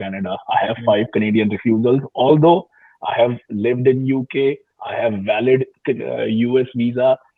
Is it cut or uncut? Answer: uncut